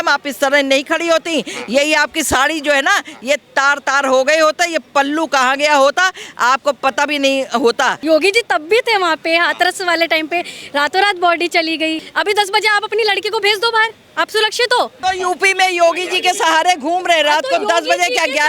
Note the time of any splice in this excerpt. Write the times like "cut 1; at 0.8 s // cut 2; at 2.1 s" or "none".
cut 1; at 8.0 s // cut 2; at 12.1 s // cut 3; at 14.9 s